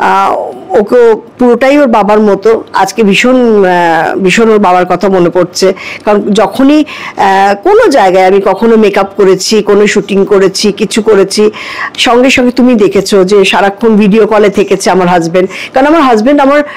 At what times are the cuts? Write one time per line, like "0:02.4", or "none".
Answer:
none